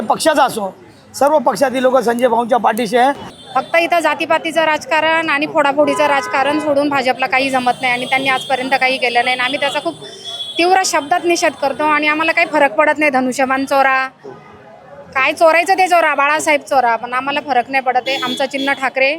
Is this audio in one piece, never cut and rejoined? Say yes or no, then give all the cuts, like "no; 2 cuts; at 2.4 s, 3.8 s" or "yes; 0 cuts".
no; 1 cut; at 3.3 s